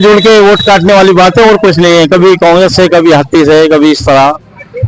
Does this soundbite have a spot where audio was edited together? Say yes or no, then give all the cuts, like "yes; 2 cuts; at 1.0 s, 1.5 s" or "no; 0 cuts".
no; 0 cuts